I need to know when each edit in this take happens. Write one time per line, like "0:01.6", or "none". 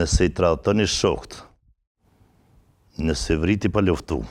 none